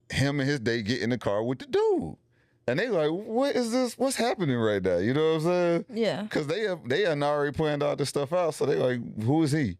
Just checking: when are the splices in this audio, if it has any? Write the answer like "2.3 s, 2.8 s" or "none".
none